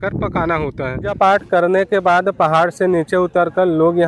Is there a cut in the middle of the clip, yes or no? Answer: yes